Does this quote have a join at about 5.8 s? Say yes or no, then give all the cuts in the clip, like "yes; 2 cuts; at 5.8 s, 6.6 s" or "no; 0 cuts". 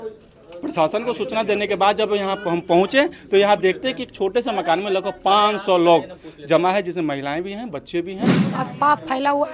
no; 1 cut; at 8.3 s